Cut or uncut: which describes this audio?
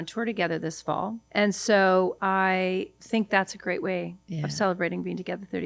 cut